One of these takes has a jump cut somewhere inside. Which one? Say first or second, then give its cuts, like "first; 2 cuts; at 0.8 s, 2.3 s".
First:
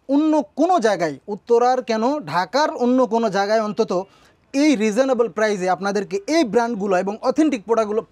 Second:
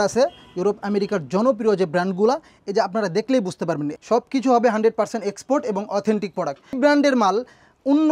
second; 2 cuts; at 4.0 s, 6.8 s